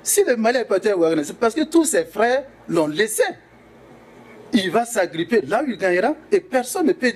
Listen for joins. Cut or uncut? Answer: uncut